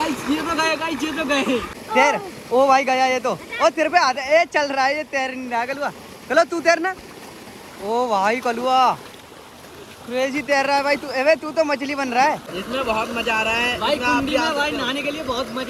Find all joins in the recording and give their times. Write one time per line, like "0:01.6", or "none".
0:01.8
0:12.5